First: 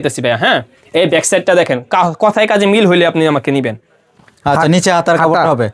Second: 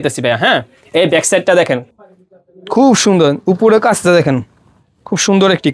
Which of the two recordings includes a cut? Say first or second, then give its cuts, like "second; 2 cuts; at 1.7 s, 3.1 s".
second; 1 cut; at 1.8 s